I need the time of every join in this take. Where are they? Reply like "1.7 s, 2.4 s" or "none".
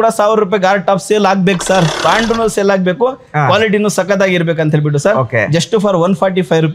2.0 s